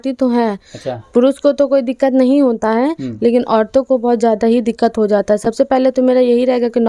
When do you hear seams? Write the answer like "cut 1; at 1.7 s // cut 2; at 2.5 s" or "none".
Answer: none